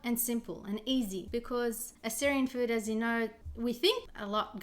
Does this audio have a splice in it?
yes; 1 cut; at 1.5 s

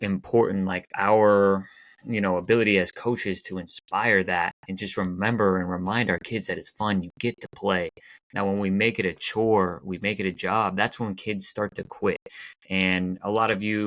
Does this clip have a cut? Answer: no; 0 cuts

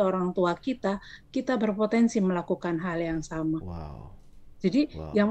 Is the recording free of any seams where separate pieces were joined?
yes; 0 cuts

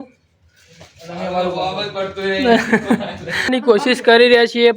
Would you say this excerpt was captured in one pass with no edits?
no; 1 cut; at 3.5 s

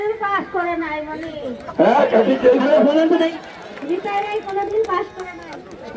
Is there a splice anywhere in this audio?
no; 0 cuts

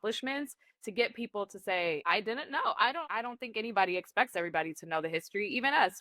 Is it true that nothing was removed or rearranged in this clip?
no; 1 cut; at 2.0 s

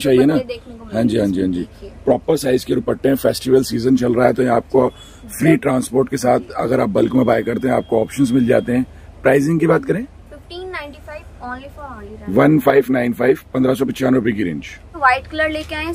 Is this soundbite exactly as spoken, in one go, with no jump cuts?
yes; 0 cuts

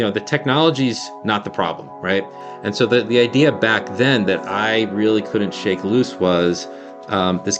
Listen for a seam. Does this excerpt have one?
yes; 1 cut; at 2.5 s

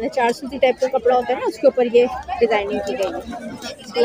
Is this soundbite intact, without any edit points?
yes; 0 cuts

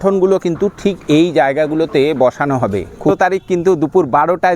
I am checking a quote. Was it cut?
yes; 1 cut; at 3.1 s

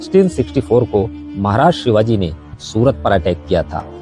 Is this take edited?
no; 0 cuts

